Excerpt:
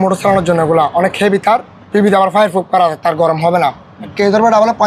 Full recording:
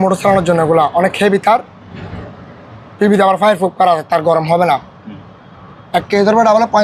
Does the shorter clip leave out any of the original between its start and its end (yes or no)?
yes